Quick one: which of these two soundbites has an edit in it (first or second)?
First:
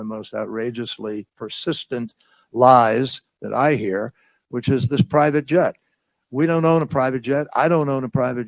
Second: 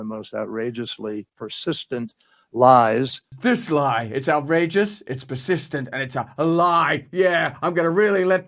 first